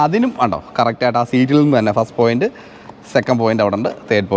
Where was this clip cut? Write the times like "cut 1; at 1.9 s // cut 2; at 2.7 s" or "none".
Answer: none